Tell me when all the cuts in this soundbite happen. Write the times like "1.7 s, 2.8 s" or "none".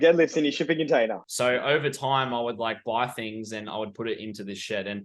1.2 s